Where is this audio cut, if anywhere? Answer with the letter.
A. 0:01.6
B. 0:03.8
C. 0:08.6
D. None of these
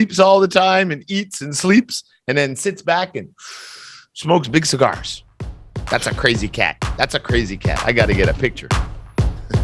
C